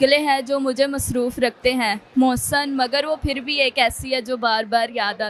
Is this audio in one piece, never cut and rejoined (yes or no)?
yes